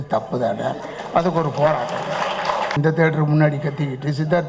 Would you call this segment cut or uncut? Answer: cut